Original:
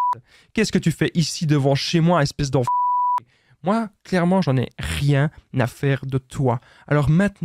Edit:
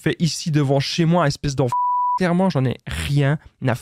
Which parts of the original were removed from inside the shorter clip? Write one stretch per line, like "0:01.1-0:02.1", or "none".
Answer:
0:03.1-0:04.1